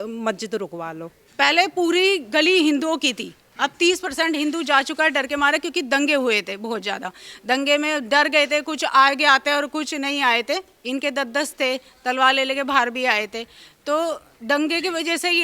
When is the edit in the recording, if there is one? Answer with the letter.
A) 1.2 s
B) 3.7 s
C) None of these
A